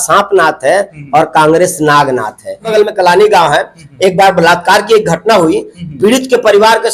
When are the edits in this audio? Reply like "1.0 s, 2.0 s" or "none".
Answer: 2.7 s